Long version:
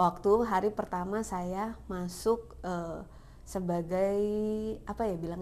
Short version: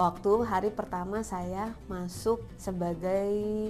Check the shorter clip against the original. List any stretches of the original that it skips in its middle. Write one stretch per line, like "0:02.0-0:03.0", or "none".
0:02.5-0:03.4